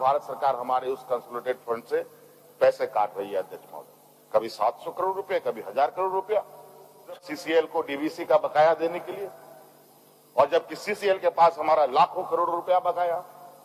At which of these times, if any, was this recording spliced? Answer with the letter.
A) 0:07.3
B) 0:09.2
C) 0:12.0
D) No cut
A